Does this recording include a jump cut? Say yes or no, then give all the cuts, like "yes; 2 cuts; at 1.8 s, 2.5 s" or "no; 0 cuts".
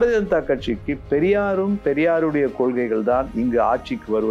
yes; 1 cut; at 1.0 s